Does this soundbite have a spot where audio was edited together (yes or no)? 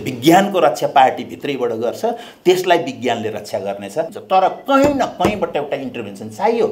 yes